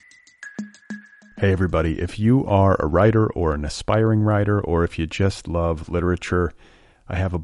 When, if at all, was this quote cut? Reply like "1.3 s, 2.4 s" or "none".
0.9 s

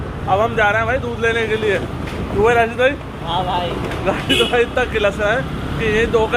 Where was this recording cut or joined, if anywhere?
none

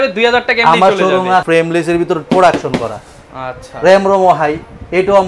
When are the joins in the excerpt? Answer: 1.4 s

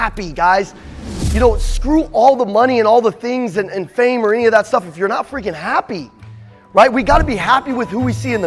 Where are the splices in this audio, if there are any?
none

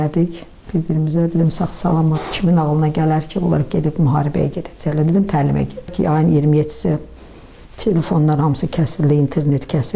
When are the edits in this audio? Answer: 5.9 s

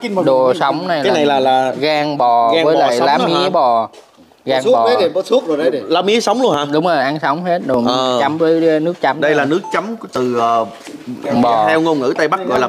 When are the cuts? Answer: none

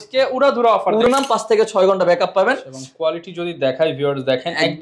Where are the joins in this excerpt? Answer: 1.1 s

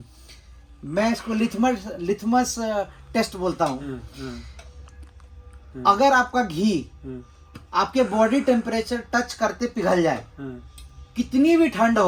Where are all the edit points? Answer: none

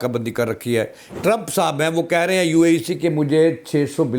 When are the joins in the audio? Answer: 1.1 s

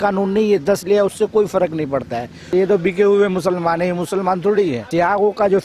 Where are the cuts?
2.5 s, 4.9 s

